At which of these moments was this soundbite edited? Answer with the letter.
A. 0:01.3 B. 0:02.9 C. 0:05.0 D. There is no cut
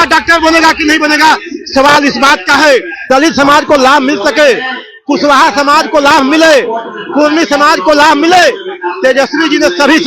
B